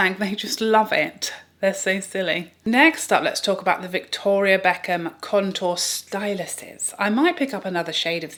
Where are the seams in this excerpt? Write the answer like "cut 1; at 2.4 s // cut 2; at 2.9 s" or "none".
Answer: none